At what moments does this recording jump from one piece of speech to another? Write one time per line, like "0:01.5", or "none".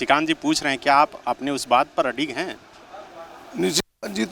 none